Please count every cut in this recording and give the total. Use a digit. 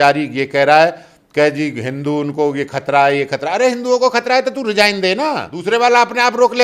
1